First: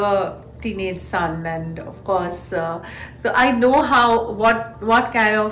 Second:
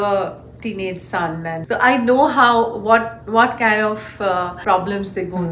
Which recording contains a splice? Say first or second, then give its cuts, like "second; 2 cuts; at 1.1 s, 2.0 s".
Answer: second; 2 cuts; at 1.6 s, 4.6 s